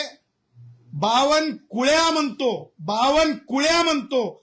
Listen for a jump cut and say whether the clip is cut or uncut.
uncut